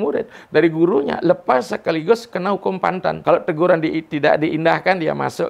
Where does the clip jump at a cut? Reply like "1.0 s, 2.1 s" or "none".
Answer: 3.2 s